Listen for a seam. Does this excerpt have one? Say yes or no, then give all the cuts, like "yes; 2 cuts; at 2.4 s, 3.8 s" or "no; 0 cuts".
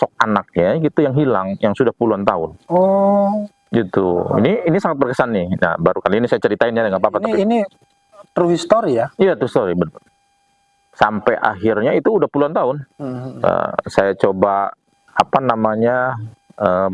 no; 0 cuts